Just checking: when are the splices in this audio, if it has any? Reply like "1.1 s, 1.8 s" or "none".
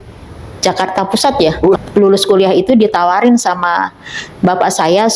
1.8 s